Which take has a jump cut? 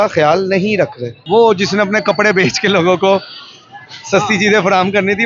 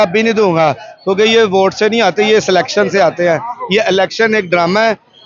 first; 1 cut; at 1.1 s

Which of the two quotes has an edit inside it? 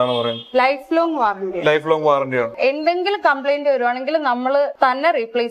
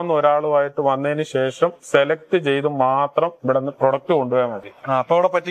first; 2 cuts; at 2.5 s, 4.7 s

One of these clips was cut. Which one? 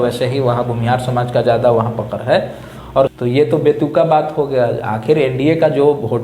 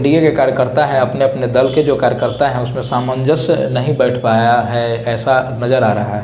first; 1 cut; at 3.1 s

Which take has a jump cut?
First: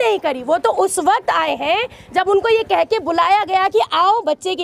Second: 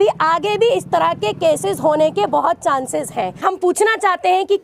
second; 1 cut; at 3.4 s

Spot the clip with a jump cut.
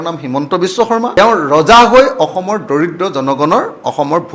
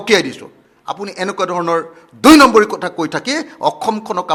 first; 1 cut; at 1.1 s

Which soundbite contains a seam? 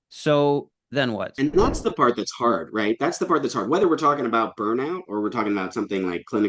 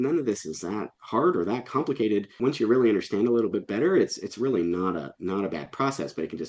first; 1 cut; at 1.3 s

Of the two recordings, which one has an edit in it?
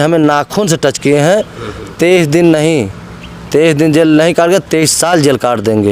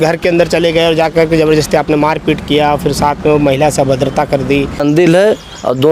second; 1 cut; at 4.8 s

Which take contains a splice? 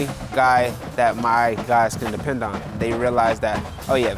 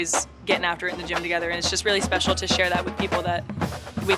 first; 1 cut; at 2.7 s

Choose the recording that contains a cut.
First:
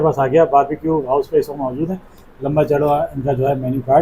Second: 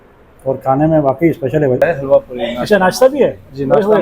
second; 1 cut; at 1.8 s

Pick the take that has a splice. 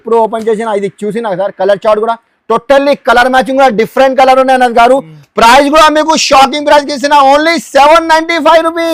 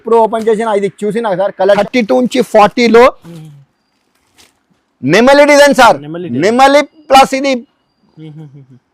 second; 1 cut; at 1.8 s

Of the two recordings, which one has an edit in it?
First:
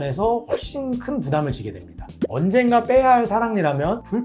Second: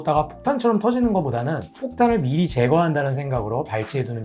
first; 1 cut; at 2.1 s

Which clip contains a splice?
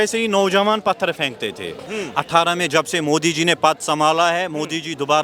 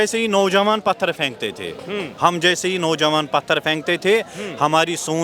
first; 1 cut; at 1.7 s

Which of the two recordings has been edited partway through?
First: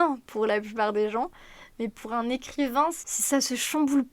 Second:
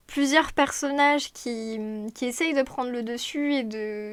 first; 1 cut; at 3.1 s

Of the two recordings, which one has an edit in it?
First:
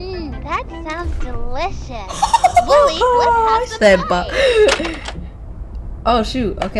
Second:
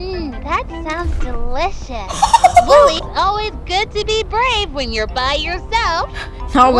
second; 1 cut; at 3.0 s

